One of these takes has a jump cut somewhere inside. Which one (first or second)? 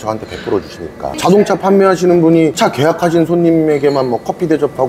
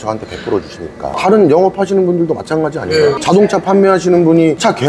first